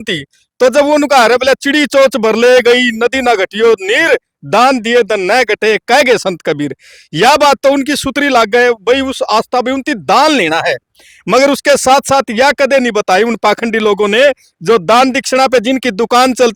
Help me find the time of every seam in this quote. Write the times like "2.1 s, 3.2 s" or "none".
none